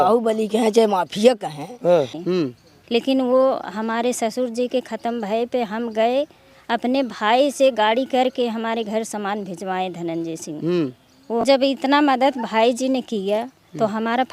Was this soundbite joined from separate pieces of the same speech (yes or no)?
yes